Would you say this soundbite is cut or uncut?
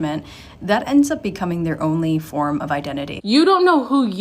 cut